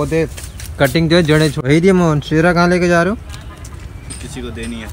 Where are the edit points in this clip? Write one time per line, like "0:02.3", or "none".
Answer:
0:01.6